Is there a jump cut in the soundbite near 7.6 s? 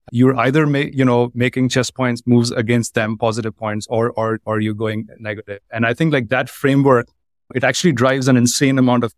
yes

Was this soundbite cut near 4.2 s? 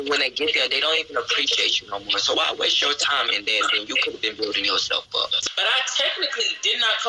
no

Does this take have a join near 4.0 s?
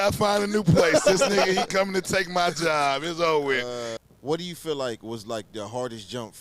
yes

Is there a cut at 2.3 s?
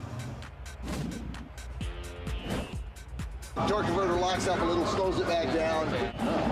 no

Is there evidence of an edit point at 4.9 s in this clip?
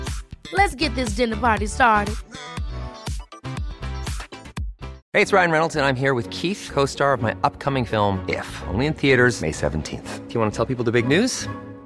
yes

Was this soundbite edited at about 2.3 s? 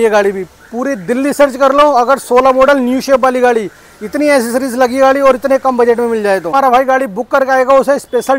no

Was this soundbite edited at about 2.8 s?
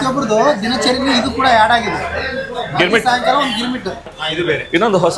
no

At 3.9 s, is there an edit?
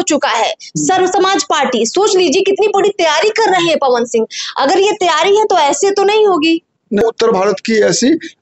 no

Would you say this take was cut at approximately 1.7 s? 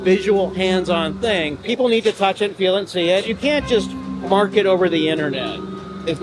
yes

